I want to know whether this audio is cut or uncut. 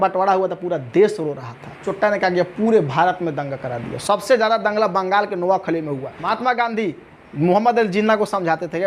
cut